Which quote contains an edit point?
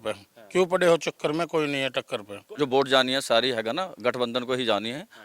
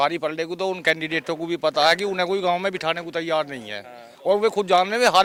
first; 1 cut; at 2.4 s

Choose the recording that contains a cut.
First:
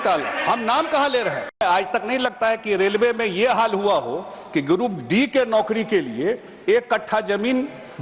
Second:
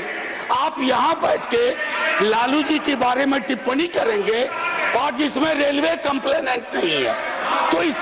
first; 1 cut; at 1.6 s

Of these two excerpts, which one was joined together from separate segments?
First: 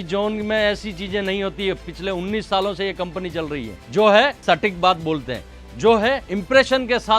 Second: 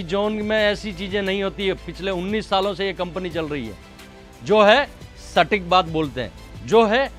first; 3 cuts; at 3.8 s, 4.4 s, 6.3 s

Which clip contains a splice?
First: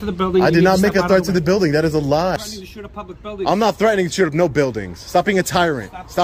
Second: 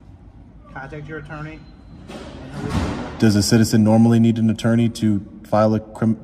first; 1 cut; at 2.4 s

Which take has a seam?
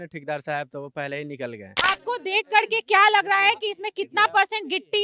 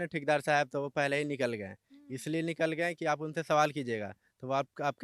first; 1 cut; at 1.7 s

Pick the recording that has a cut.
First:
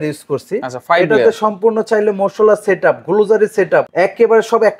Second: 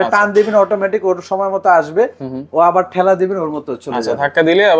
first; 1 cut; at 3.9 s

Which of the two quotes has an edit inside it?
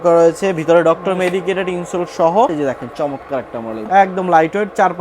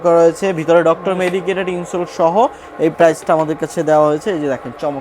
first; 2 cuts; at 2.5 s, 3.9 s

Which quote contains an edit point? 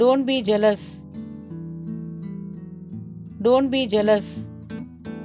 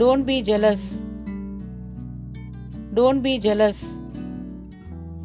second; 3 cuts; at 0.8 s, 2.9 s, 4.3 s

